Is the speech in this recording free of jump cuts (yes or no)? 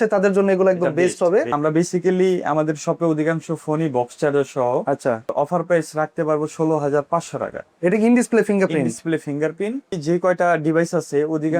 no